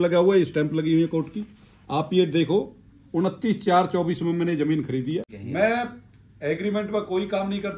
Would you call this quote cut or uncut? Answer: cut